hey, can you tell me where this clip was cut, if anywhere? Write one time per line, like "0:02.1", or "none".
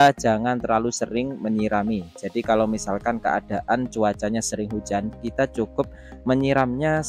none

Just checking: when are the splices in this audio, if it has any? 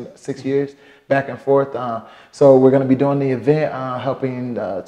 none

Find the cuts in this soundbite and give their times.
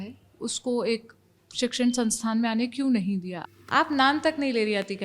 0:03.3

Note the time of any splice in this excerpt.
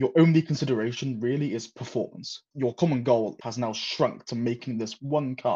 0:02.4
0:03.4

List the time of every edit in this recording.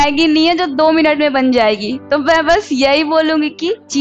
none

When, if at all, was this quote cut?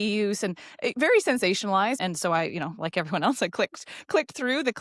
0:02.0

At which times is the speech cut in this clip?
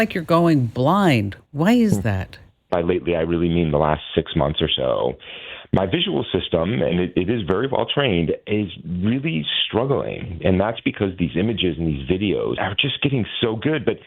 0:02.7
0:12.6

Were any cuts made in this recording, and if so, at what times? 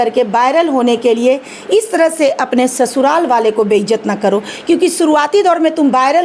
none

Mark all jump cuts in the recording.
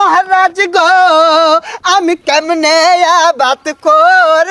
none

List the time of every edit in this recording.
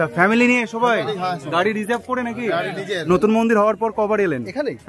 0:03.0

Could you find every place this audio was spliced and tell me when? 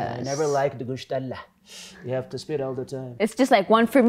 0:03.0

